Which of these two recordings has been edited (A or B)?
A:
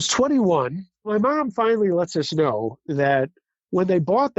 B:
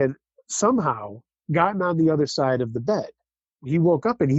A